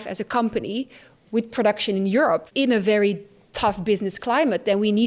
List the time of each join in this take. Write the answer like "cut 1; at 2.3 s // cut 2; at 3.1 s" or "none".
cut 1; at 2.5 s